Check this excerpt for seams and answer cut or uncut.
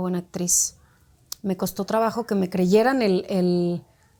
uncut